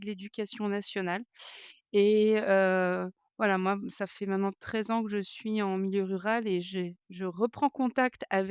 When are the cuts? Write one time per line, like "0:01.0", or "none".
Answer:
none

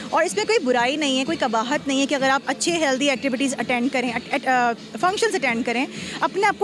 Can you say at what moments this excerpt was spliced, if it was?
none

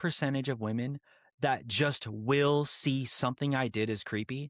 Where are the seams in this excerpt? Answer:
none

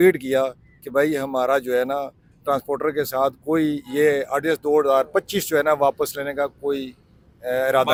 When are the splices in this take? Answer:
none

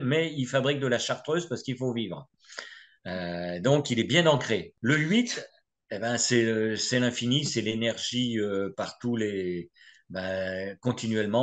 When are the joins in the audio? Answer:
0:04.7

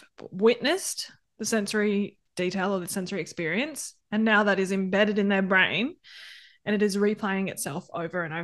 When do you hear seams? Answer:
none

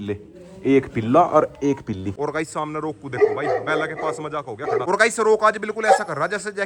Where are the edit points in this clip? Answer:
0:02.2
0:04.8

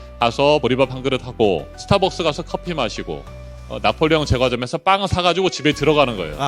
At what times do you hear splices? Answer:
none

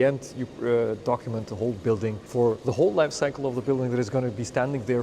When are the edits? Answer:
0:02.5

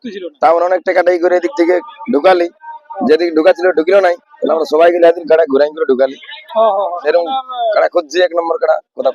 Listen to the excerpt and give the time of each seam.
0:07.0

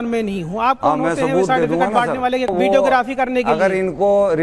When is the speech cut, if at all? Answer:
0:02.5

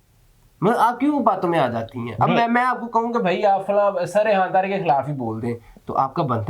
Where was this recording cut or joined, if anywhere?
none

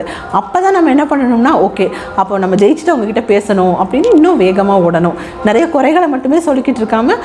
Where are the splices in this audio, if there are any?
none

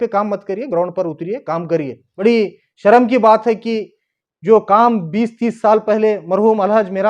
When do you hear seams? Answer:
0:02.0

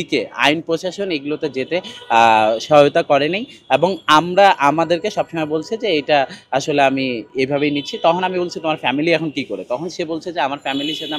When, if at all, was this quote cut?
none

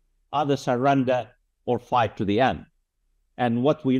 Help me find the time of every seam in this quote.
none

